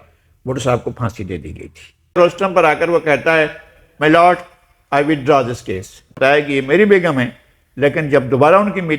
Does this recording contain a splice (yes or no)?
yes